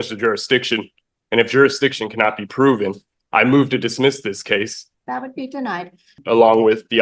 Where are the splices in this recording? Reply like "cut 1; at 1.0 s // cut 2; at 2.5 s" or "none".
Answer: cut 1; at 4.8 s // cut 2; at 6.2 s